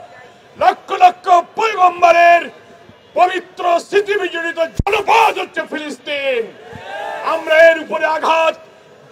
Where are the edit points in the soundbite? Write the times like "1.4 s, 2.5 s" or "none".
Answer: none